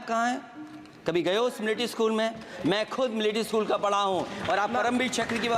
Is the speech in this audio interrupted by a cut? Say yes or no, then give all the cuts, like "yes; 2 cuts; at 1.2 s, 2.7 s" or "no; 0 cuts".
no; 0 cuts